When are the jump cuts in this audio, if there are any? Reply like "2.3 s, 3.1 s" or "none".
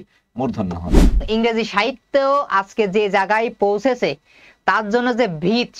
1.2 s